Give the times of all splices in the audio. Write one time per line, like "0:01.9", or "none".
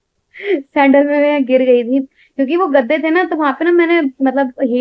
none